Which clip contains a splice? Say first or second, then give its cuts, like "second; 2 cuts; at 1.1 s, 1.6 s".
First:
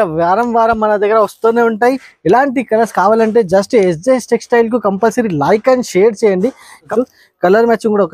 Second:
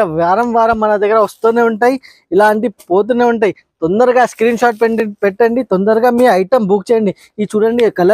first; 2 cuts; at 2.1 s, 6.9 s